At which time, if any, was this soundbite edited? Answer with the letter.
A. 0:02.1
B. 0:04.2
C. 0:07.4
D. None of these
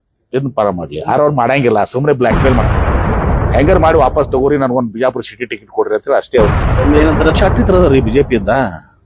C